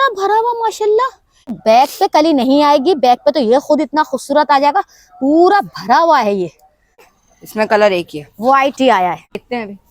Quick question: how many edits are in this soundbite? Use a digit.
0